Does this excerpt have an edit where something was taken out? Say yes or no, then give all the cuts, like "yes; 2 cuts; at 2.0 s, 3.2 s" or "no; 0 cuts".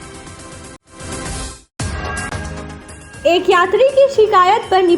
yes; 1 cut; at 2.9 s